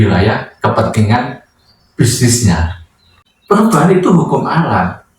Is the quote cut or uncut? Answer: cut